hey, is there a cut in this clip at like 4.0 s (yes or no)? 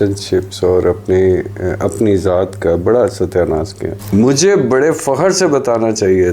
yes